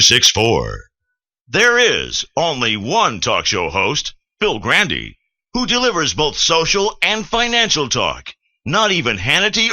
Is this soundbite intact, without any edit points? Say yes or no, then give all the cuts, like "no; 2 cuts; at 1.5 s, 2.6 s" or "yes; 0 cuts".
no; 1 cut; at 1.2 s